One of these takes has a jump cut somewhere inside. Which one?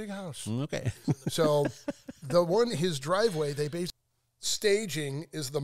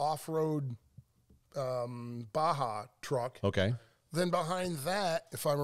first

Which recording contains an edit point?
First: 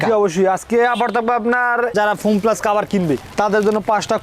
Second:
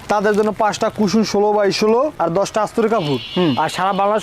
first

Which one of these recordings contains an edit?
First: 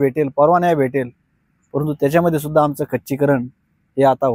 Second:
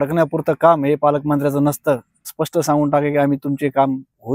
second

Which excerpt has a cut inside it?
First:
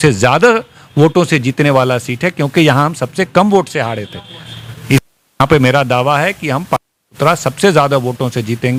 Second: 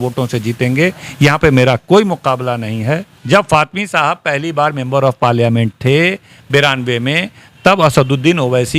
second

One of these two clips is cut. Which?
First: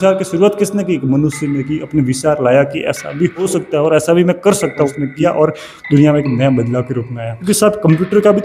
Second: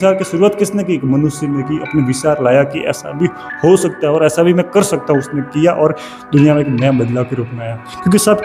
first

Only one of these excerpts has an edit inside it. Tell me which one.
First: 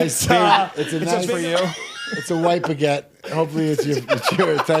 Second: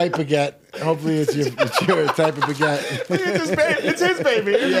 first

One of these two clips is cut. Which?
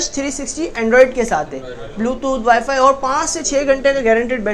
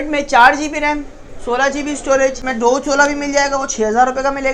second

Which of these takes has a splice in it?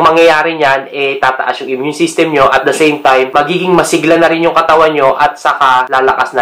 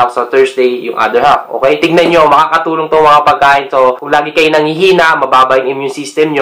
second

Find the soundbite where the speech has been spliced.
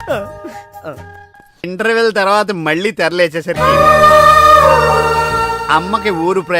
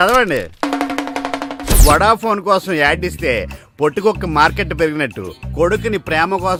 first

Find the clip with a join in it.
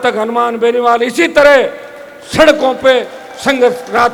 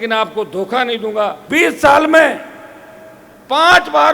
second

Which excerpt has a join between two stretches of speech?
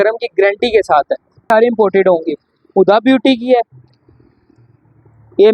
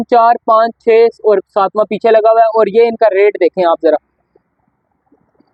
first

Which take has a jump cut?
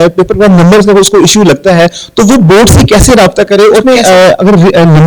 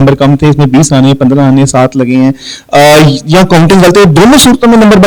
first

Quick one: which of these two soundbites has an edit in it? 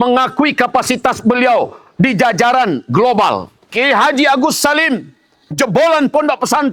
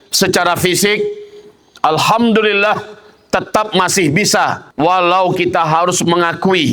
second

